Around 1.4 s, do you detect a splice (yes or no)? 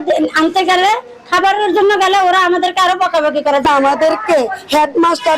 no